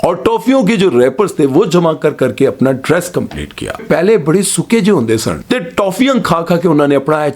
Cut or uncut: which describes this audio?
cut